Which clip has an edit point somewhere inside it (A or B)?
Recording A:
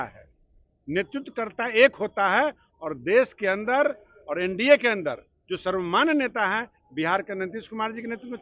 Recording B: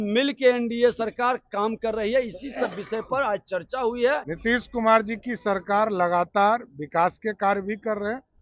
B